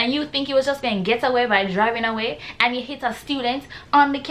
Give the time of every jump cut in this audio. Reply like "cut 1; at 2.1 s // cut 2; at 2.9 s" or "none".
none